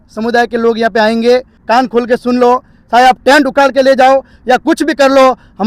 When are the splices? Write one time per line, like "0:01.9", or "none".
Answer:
0:01.5